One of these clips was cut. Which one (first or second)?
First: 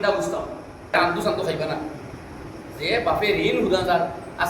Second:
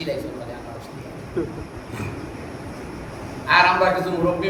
first